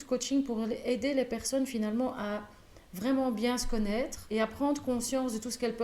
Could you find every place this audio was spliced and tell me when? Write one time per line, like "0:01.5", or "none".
0:04.2